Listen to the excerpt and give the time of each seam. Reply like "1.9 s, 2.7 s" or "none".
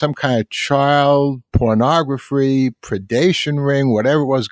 1.4 s